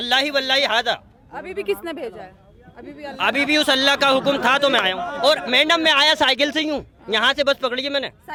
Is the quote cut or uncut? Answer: uncut